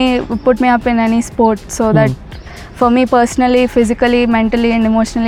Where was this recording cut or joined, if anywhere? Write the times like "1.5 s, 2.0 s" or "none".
none